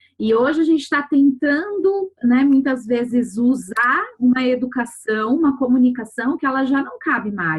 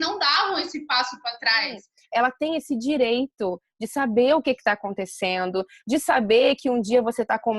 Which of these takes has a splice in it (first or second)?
second